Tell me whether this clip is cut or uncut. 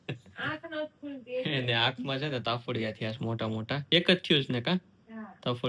cut